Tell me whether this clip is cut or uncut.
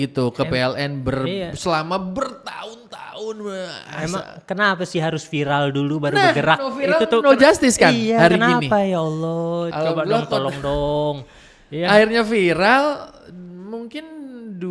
uncut